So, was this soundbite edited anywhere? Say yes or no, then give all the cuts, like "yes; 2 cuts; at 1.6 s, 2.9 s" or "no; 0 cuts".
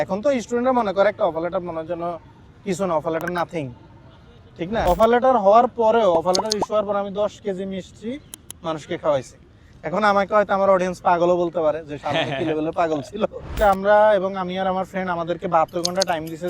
yes; 2 cuts; at 4.9 s, 13.5 s